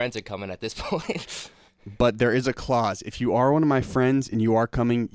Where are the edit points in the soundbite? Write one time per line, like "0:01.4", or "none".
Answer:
none